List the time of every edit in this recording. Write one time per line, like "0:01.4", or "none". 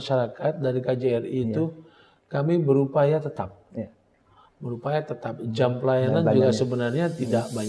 none